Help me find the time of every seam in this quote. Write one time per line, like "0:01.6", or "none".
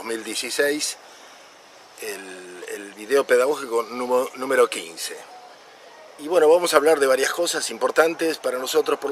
none

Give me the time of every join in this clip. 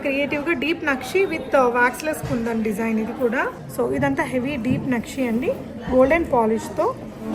0:03.6

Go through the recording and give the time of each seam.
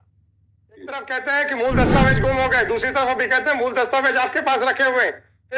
0:01.0

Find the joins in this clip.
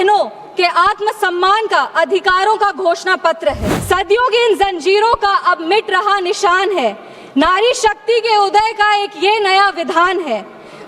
0:03.7

